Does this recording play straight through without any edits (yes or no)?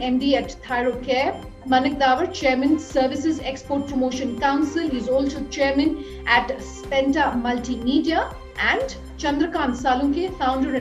no